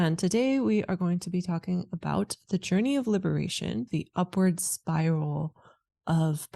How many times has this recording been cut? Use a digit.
1